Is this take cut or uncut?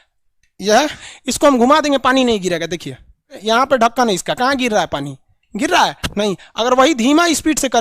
cut